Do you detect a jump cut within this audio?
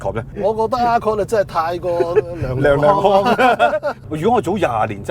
yes; 1 cut; at 4.0 s

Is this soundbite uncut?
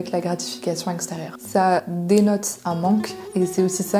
no; 1 cut; at 1.7 s

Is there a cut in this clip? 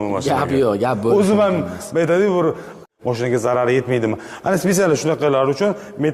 yes; 1 cut; at 2.8 s

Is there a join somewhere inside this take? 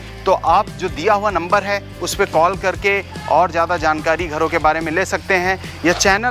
no; 0 cuts

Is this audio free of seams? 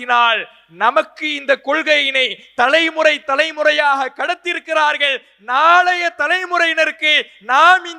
yes; 0 cuts

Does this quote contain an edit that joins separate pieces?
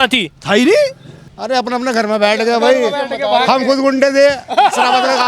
yes; 1 cut; at 1.3 s

